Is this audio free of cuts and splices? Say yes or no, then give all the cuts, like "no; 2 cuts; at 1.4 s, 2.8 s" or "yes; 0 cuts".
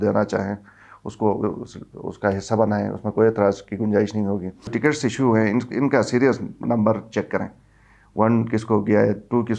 no; 1 cut; at 4.7 s